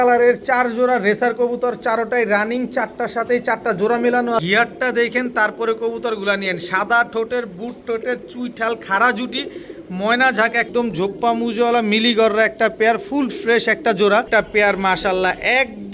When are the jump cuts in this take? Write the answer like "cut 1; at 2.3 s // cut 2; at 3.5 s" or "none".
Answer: cut 1; at 4.4 s // cut 2; at 10.7 s // cut 3; at 14.3 s